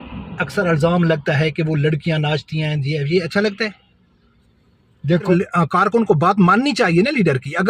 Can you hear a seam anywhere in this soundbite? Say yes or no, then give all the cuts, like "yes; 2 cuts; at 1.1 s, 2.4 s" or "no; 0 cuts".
yes; 1 cut; at 5.3 s